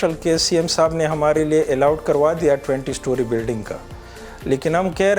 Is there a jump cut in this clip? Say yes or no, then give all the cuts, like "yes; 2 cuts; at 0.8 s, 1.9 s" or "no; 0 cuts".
no; 0 cuts